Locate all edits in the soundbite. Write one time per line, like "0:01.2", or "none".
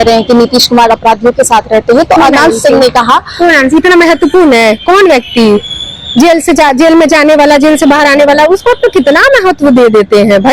none